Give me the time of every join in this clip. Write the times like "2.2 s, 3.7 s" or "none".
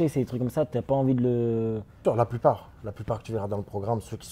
2.0 s